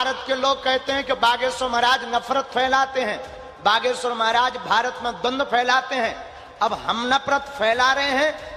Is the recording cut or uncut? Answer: uncut